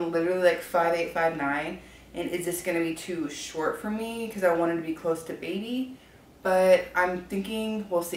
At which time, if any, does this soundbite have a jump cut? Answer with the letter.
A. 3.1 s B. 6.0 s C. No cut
C